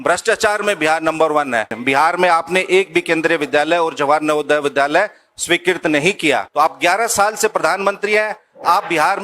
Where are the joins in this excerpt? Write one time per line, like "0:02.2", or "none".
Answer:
0:01.8
0:06.5